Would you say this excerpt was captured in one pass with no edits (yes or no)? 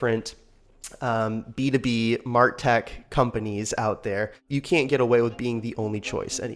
no